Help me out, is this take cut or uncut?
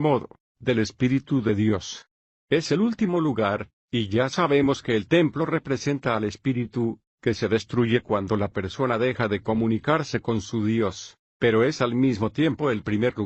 cut